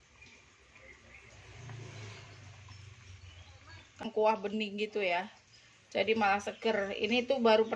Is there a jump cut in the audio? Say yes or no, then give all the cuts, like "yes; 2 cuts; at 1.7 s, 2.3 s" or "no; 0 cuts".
yes; 1 cut; at 4.0 s